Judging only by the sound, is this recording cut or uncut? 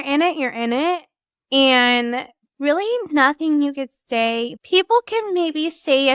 uncut